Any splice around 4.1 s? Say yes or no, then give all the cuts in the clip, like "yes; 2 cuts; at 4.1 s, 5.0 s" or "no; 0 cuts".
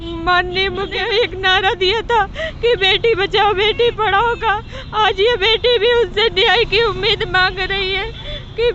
no; 1 cut; at 1.0 s